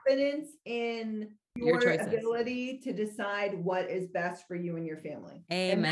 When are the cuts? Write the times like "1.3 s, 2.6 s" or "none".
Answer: 1.5 s